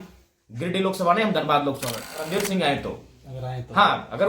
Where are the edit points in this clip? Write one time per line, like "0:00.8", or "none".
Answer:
0:02.3